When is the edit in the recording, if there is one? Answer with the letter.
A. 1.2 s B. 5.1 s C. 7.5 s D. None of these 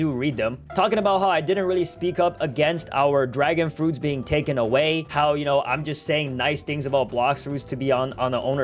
B